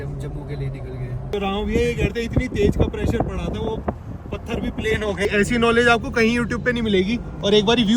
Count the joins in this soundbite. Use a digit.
2